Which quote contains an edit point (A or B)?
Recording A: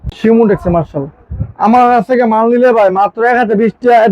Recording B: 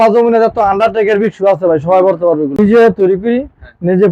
B